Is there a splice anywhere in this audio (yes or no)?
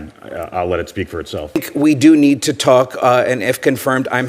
yes